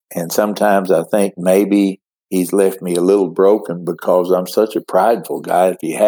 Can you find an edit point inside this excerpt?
no; 0 cuts

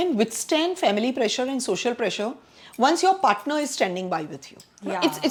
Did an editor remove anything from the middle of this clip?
no; 0 cuts

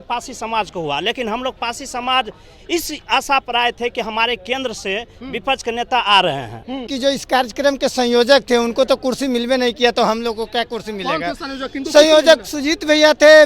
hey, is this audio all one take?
no; 1 cut; at 6.9 s

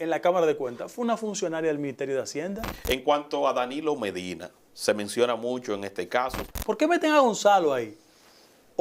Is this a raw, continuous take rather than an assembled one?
no; 2 cuts; at 2.7 s, 6.4 s

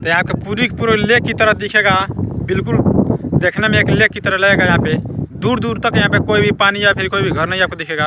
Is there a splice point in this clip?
no; 0 cuts

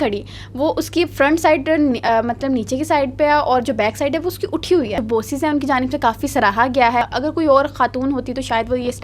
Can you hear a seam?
yes; 2 cuts; at 5.0 s, 7.0 s

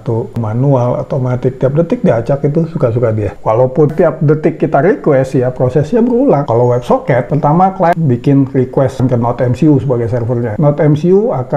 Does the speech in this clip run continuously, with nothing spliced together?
no; 1 cut; at 3.4 s

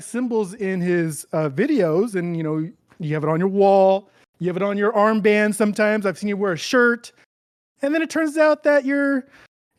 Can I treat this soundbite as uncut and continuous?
yes; 0 cuts

